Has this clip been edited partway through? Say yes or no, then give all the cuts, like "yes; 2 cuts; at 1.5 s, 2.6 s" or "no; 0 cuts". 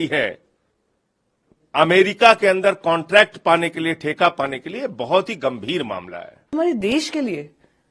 yes; 1 cut; at 6.5 s